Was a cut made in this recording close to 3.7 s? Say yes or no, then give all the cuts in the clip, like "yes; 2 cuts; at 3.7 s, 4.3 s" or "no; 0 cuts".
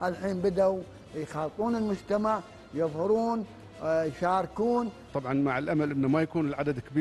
no; 1 cut; at 5.0 s